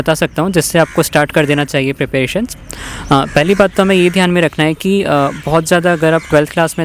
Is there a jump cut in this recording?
no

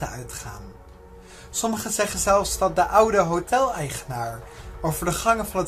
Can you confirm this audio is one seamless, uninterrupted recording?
no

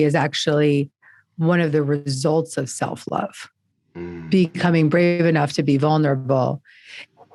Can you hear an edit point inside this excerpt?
no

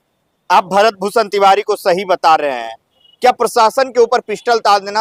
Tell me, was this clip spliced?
no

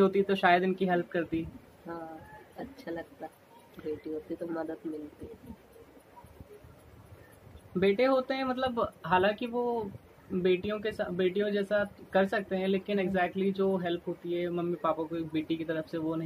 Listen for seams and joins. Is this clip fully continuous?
yes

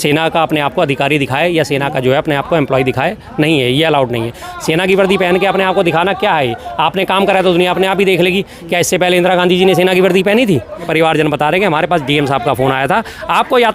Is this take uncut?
no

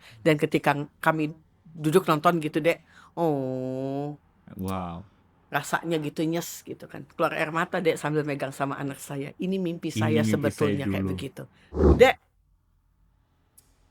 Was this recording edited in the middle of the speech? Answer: yes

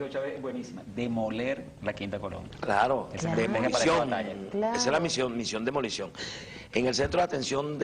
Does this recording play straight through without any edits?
no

